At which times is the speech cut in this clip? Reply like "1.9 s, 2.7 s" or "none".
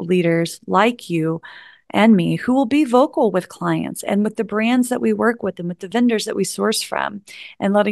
5.8 s